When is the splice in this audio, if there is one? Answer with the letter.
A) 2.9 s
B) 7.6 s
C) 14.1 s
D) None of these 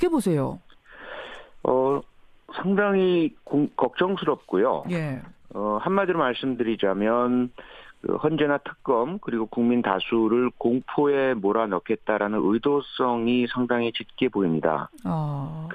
A